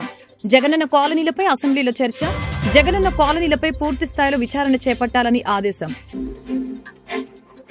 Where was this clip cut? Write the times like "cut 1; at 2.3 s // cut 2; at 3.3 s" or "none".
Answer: cut 1; at 6.0 s

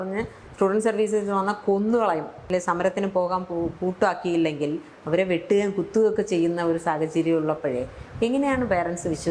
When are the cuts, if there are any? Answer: cut 1; at 2.4 s

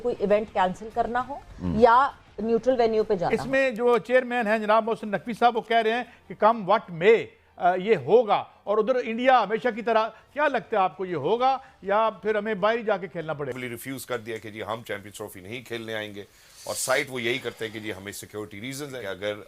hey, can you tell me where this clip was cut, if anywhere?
cut 1; at 3.3 s // cut 2; at 13.5 s

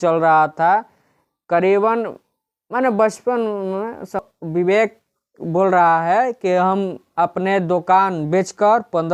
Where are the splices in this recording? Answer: cut 1; at 4.2 s

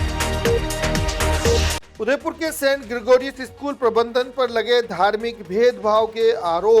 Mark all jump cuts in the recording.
cut 1; at 1.6 s

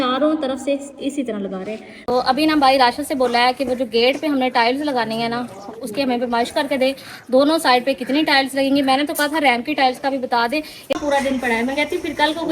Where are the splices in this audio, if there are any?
cut 1; at 1.9 s // cut 2; at 11.0 s

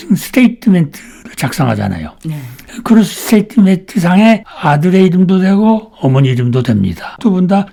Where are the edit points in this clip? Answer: none

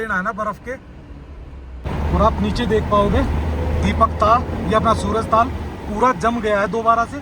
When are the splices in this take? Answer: cut 1; at 1.9 s

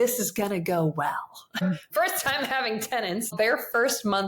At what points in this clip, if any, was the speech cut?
cut 1; at 1.6 s // cut 2; at 3.3 s

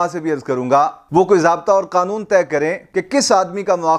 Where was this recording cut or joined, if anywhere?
none

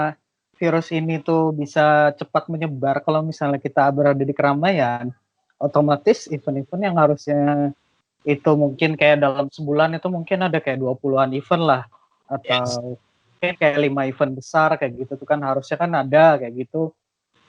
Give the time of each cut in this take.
none

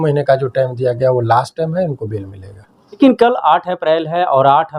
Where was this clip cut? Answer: cut 1; at 3.0 s

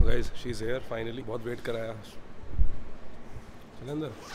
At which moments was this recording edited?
none

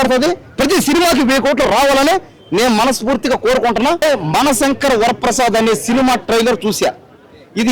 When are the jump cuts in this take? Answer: cut 1; at 4.0 s

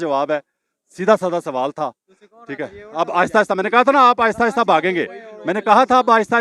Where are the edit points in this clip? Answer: none

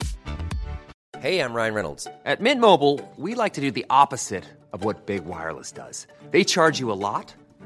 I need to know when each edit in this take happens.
cut 1; at 0.9 s

